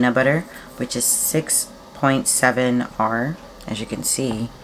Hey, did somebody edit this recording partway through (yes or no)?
yes